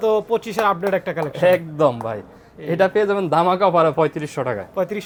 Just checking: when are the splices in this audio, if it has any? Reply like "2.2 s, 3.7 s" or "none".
none